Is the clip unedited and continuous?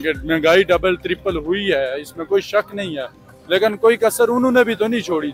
yes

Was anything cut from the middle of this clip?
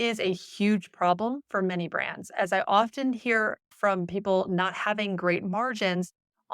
yes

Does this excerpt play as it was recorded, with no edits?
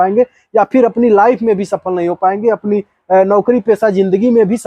yes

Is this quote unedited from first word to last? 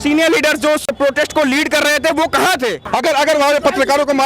no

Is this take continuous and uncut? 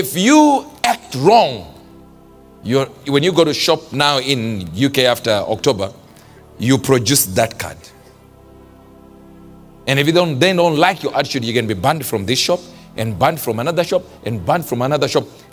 yes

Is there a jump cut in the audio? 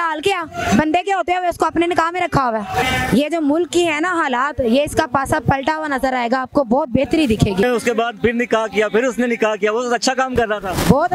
yes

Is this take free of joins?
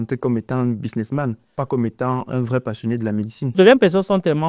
no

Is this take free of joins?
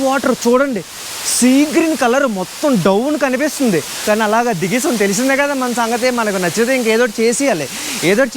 no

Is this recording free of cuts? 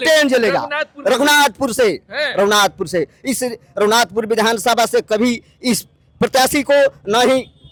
yes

